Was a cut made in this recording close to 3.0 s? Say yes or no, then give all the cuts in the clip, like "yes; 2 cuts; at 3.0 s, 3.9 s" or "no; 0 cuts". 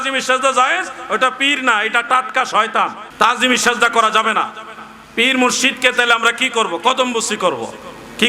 yes; 1 cut; at 3.0 s